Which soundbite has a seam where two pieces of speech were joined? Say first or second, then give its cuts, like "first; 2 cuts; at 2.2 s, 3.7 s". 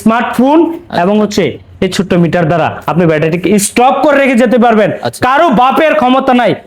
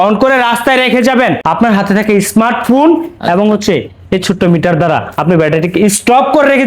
second; 1 cut; at 1.4 s